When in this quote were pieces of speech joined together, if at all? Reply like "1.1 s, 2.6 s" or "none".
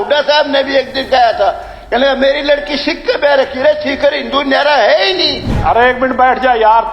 5.5 s